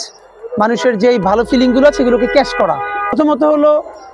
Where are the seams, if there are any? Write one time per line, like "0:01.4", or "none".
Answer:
0:03.1